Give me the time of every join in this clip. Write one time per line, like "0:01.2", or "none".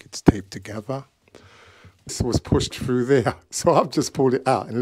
0:02.1